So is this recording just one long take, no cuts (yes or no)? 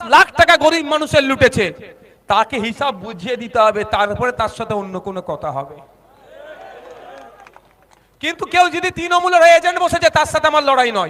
yes